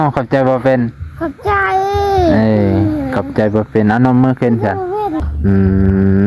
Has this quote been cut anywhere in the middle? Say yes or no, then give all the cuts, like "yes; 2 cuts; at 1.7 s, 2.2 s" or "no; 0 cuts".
yes; 1 cut; at 5.2 s